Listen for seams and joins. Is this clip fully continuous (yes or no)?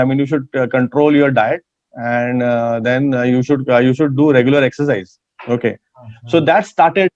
yes